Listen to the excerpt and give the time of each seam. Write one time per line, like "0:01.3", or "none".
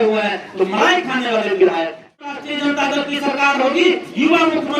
0:02.5